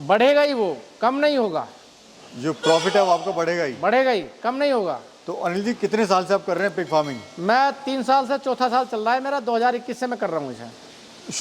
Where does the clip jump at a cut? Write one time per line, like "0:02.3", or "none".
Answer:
none

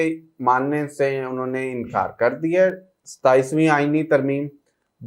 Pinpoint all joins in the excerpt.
none

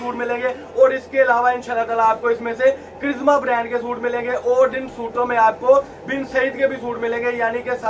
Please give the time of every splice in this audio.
none

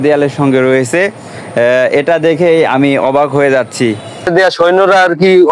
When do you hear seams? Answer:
0:04.3

